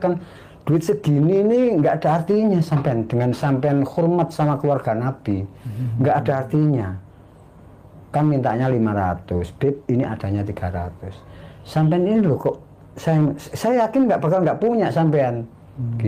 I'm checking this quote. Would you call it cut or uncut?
uncut